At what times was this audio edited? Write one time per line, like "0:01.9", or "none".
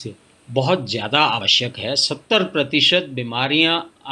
none